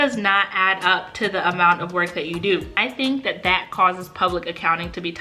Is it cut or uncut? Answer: cut